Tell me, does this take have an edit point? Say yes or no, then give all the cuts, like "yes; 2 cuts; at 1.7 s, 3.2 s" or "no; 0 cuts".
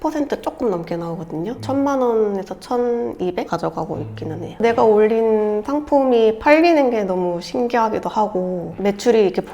yes; 1 cut; at 4.5 s